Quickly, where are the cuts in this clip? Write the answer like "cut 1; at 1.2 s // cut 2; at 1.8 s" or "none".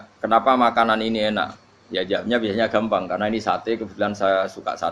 none